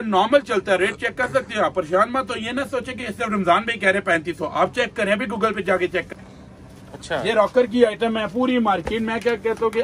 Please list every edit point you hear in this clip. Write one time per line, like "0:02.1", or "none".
0:06.1